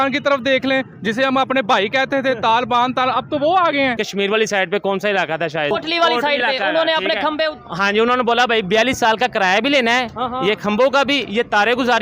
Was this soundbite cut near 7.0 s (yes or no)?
no